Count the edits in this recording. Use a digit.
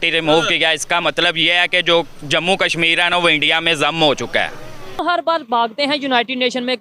1